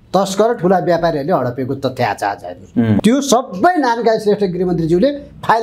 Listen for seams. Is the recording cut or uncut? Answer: cut